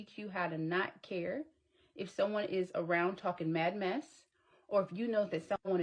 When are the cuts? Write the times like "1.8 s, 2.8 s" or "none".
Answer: none